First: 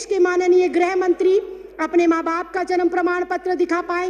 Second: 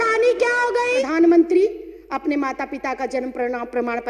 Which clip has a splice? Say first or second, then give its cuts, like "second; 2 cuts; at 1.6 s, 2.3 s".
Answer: second; 1 cut; at 1.0 s